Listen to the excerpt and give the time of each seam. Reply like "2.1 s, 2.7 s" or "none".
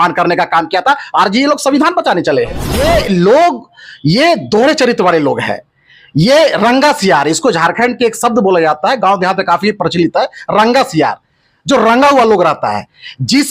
2.6 s